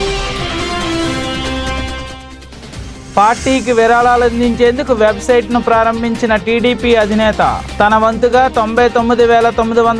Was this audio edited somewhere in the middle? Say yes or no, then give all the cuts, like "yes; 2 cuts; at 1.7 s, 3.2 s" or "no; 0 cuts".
no; 0 cuts